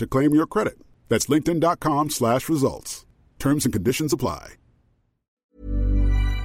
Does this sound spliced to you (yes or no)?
yes